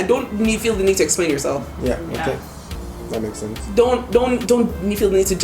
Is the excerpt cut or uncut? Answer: uncut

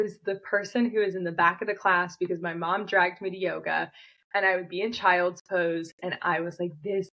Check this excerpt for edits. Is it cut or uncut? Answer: uncut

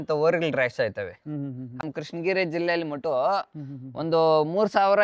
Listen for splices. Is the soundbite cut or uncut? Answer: cut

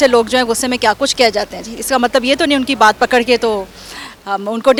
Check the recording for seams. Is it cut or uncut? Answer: uncut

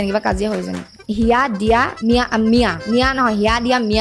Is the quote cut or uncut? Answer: cut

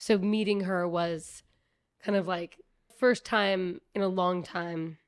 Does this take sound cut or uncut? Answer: cut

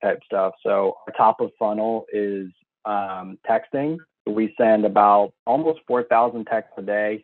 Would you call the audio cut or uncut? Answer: cut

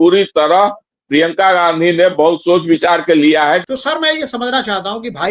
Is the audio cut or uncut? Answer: uncut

